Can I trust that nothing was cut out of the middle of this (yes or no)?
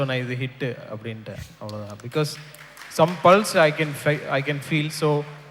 yes